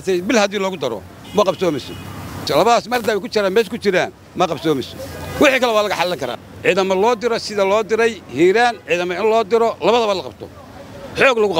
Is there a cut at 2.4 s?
yes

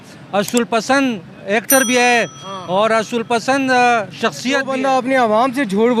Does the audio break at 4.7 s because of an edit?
yes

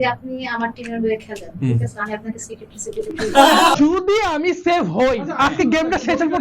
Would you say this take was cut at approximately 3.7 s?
yes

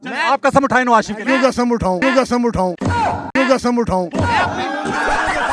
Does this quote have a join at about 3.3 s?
no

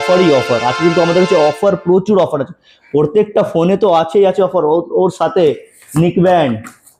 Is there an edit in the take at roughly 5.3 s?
no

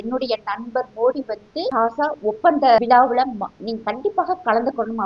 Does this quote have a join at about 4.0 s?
no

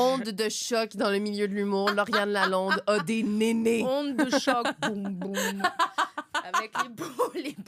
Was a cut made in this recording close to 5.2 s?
no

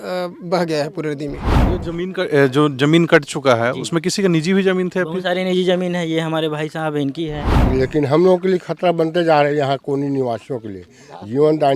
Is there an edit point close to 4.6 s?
no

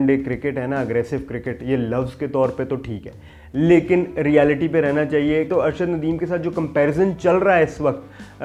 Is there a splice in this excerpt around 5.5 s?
yes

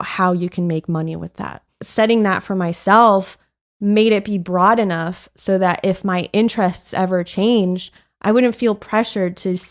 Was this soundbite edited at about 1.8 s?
yes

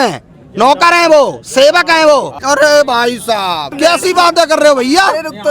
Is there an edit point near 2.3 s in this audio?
yes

